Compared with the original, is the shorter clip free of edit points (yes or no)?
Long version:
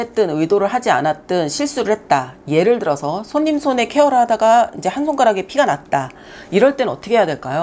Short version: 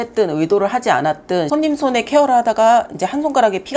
no